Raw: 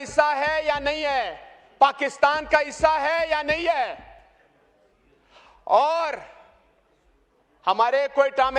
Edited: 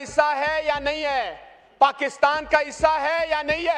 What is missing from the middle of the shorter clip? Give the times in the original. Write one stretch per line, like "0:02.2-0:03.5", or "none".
none